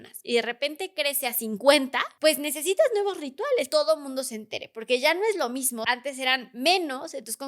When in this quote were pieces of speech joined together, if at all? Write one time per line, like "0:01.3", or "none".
0:02.1
0:03.7
0:05.8